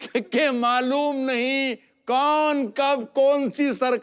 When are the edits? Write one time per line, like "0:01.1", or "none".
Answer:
none

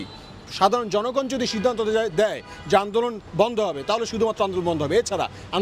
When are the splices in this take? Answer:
none

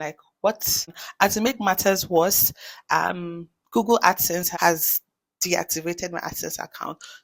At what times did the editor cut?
0:01.0
0:04.5

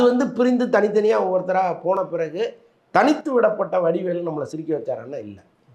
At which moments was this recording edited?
none

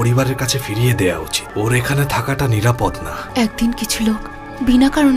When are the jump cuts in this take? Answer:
0:01.4
0:03.2

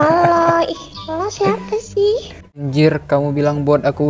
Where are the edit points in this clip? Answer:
0:02.6

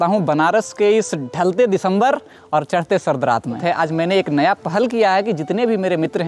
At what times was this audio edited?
0:03.6

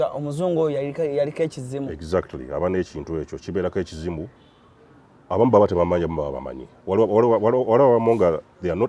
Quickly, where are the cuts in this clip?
none

